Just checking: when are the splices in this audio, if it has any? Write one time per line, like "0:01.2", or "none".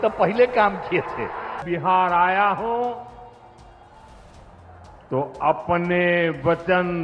0:01.6